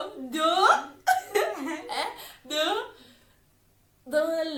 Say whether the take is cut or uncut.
uncut